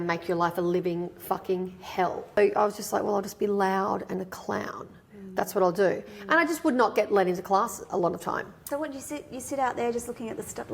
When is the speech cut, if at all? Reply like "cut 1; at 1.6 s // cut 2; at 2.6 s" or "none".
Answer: cut 1; at 2.4 s // cut 2; at 8.6 s